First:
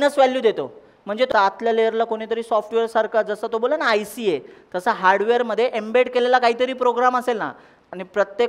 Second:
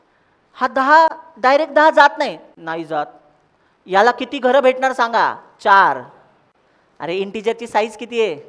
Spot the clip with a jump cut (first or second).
first